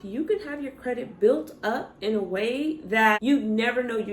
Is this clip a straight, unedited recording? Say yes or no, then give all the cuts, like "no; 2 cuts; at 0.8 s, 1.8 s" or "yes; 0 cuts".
yes; 0 cuts